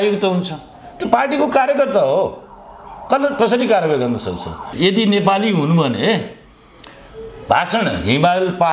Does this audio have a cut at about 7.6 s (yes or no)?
no